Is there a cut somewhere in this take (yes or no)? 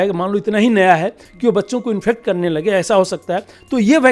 no